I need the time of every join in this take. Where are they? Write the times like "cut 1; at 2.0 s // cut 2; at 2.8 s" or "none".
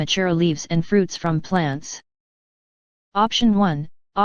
none

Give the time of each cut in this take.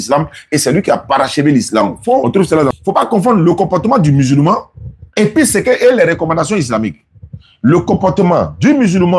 cut 1; at 2.7 s

